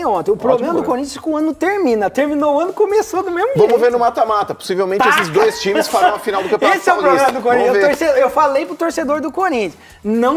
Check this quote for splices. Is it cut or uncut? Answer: uncut